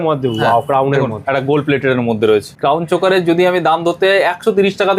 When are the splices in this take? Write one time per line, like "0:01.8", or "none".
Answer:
0:02.5